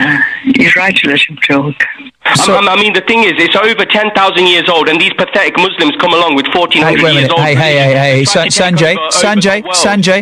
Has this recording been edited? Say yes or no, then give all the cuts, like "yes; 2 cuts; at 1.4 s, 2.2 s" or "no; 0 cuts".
no; 0 cuts